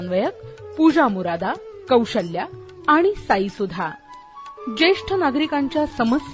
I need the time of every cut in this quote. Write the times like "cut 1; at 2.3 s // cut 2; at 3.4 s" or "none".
none